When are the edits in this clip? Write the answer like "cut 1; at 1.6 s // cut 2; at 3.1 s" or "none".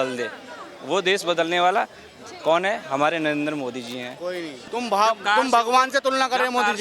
cut 1; at 4.6 s